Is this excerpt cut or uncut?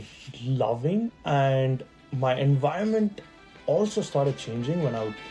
cut